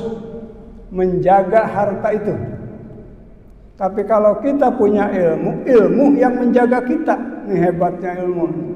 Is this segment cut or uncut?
uncut